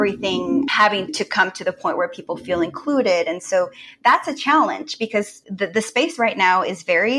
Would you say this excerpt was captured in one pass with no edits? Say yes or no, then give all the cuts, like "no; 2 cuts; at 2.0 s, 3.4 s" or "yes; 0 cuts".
no; 1 cut; at 5.4 s